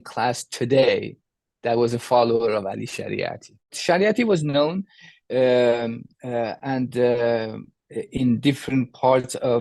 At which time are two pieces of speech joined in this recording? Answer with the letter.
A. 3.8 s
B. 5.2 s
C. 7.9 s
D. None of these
A